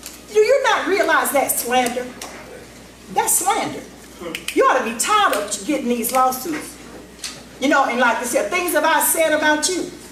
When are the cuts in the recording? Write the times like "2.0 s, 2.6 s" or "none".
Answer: none